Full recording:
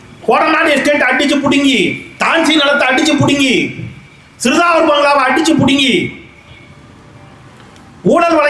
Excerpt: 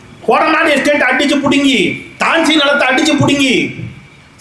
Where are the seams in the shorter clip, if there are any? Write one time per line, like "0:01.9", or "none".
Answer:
none